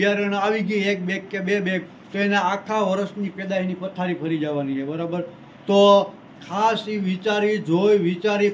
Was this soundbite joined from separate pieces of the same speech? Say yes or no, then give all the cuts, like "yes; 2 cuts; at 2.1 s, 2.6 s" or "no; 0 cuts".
no; 0 cuts